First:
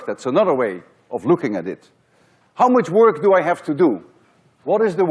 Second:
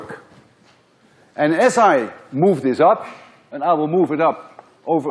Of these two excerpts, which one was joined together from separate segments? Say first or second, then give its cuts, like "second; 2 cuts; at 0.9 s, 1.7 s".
second; 1 cut; at 3.8 s